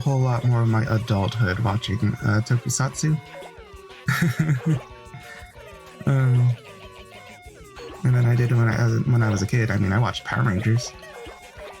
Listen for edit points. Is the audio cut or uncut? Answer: uncut